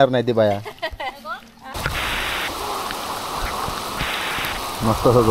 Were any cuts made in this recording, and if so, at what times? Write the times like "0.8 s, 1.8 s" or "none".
1.7 s

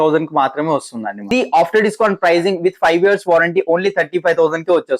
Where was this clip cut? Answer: 1.3 s

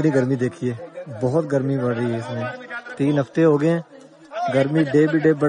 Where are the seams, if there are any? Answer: none

